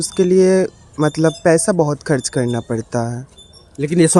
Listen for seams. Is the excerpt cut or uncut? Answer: uncut